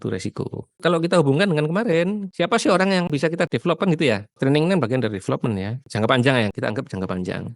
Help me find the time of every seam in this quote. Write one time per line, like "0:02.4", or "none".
0:04.4